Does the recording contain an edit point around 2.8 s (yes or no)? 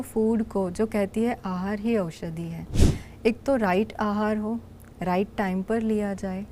yes